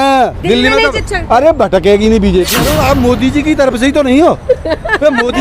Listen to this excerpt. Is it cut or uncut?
cut